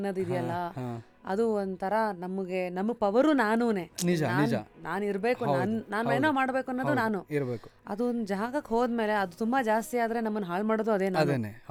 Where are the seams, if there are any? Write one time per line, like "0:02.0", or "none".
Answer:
none